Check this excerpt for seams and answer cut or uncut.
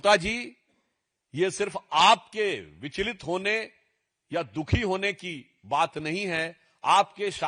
uncut